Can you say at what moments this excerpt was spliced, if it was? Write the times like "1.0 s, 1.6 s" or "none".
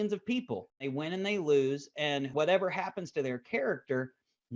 0.8 s, 2.3 s